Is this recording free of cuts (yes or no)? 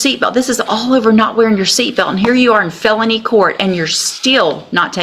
yes